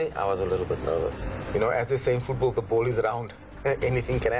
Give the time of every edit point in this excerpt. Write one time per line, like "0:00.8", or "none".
0:01.3